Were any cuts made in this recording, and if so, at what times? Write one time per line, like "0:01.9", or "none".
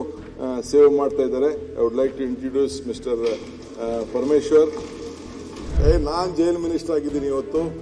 0:05.8